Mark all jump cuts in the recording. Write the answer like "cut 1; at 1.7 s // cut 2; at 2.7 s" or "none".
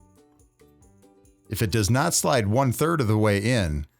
cut 1; at 1.4 s